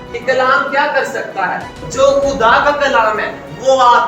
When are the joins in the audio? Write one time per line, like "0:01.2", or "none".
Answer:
0:01.8